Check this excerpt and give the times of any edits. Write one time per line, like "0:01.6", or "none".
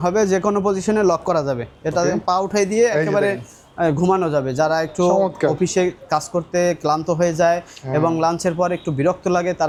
none